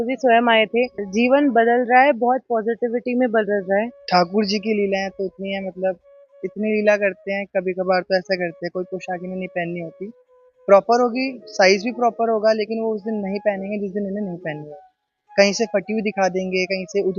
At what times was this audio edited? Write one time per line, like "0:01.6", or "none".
0:01.1
0:04.0